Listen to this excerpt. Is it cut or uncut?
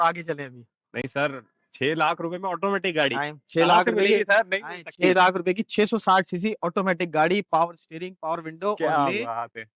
uncut